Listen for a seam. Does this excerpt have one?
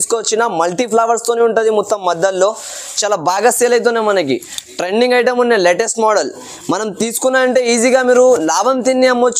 no; 0 cuts

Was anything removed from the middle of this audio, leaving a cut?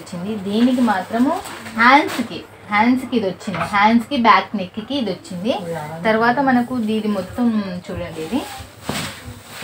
no; 0 cuts

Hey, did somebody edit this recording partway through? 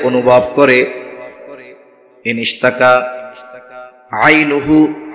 no; 0 cuts

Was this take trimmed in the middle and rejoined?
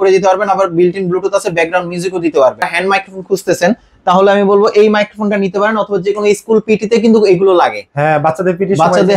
yes; 1 cut; at 2.7 s

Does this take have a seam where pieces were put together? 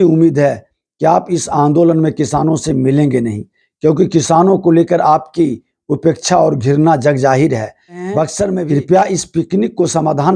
yes; 1 cut; at 8.6 s

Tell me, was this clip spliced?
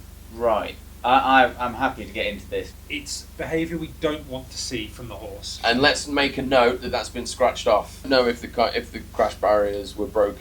yes; 3 cuts; at 2.8 s, 5.5 s, 8.0 s

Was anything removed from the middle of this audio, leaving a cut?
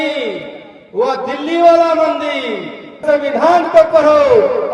yes; 1 cut; at 3.0 s

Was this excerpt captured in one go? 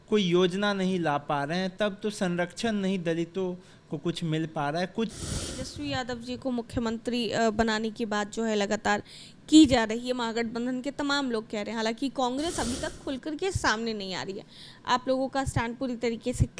no; 1 cut; at 5.1 s

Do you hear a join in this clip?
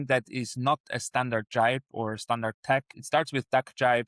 yes; 1 cut; at 3.0 s

